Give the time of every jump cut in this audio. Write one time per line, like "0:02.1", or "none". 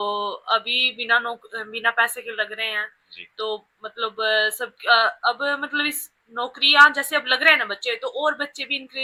none